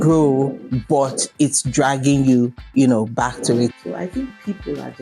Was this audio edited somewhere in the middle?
yes; 1 cut; at 3.7 s

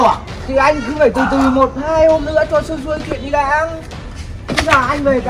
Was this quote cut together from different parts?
no; 0 cuts

